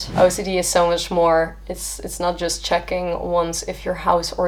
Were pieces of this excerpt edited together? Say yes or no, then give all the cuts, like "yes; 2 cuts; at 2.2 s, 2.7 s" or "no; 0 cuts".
no; 0 cuts